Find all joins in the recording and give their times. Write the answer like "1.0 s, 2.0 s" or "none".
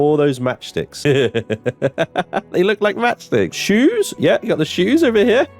0.9 s, 3.6 s

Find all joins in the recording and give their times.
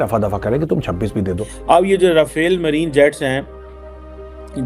1.6 s

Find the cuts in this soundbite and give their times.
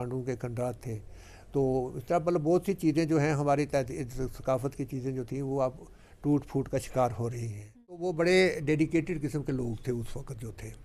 8.0 s

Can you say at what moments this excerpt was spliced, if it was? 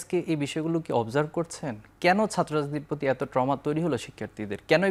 none

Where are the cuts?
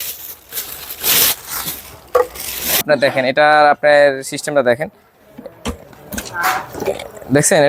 2.8 s

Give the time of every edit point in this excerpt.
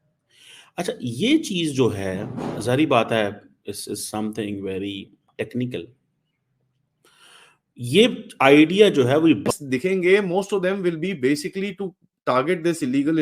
9.5 s

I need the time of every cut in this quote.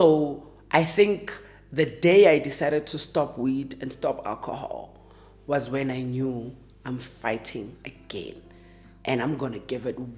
none

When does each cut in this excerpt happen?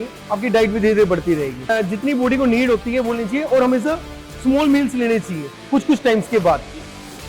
1.7 s

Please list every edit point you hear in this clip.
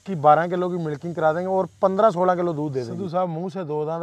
2.9 s

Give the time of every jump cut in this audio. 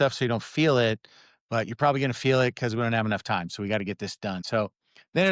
4.4 s

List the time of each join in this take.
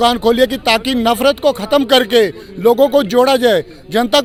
none

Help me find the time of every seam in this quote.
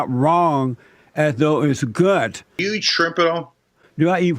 2.6 s

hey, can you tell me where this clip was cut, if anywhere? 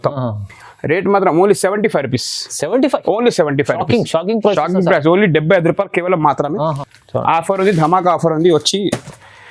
6.9 s

